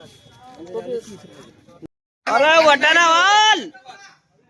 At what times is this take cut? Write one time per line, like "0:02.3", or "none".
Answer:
0:01.6